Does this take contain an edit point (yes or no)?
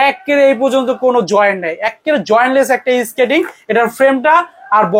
no